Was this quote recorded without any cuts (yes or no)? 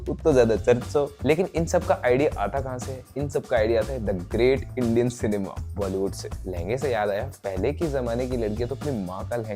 no